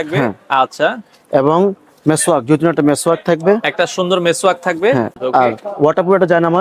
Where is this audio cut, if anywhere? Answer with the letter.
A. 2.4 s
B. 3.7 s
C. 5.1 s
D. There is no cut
C